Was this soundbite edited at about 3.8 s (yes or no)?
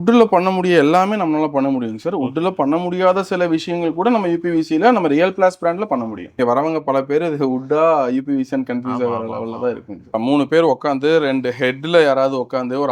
no